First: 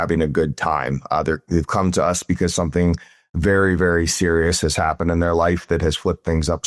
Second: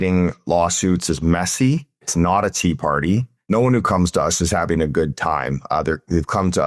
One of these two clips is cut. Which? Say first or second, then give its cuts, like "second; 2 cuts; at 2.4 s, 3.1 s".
second; 2 cuts; at 2.1 s, 3.5 s